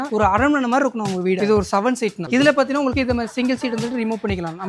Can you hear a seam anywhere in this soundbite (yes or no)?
no